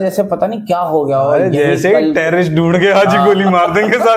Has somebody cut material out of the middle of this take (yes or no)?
no